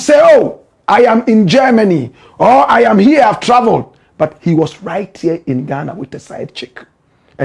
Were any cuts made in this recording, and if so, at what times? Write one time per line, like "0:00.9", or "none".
none